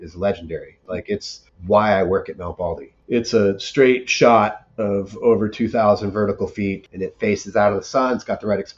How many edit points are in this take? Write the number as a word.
three